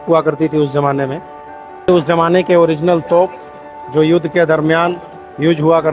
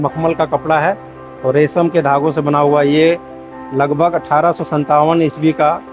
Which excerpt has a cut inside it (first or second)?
first